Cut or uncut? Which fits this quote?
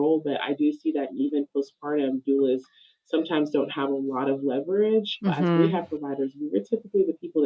cut